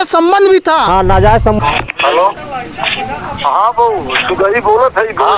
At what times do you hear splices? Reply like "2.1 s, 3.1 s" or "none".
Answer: 1.6 s